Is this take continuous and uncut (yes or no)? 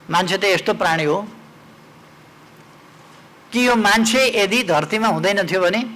yes